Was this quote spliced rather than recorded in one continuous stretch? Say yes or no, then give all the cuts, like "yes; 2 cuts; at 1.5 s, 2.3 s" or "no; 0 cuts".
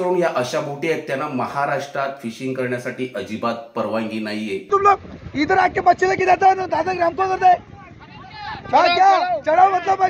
yes; 1 cut; at 4.7 s